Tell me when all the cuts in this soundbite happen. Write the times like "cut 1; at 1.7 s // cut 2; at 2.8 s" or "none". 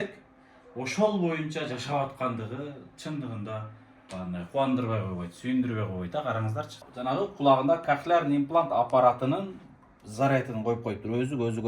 cut 1; at 6.8 s